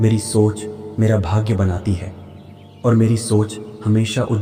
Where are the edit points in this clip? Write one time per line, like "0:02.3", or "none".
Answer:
none

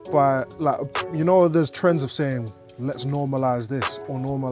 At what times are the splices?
none

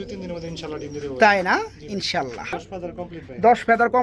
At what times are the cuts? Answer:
0:02.6

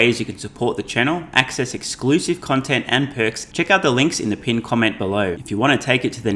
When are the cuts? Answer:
0:03.4
0:05.4

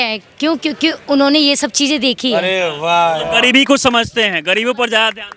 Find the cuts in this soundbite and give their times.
none

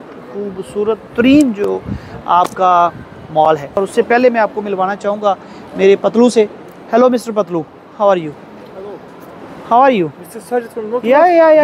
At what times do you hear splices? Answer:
0:03.8

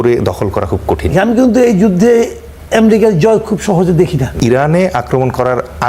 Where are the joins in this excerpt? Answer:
0:01.1
0:04.3

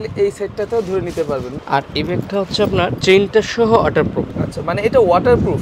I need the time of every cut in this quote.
0:01.5

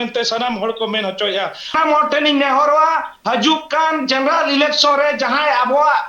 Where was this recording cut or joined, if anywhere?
0:01.7

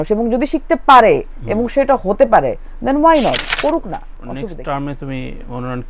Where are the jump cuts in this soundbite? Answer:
0:04.2

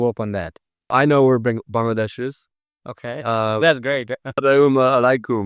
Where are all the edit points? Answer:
0:00.9

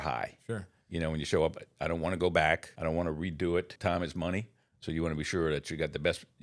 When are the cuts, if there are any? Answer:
0:02.7
0:03.7

